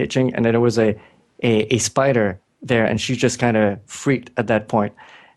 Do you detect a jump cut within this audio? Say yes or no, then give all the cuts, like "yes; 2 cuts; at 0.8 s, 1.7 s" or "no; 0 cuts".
no; 0 cuts